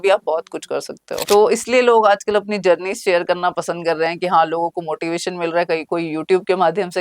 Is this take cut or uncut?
cut